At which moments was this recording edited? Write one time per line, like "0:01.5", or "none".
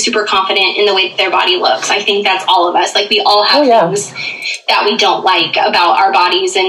none